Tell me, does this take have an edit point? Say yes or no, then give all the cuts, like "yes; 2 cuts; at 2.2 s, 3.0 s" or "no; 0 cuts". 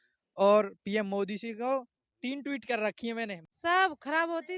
yes; 1 cut; at 3.4 s